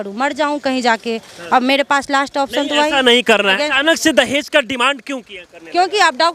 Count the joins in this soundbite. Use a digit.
1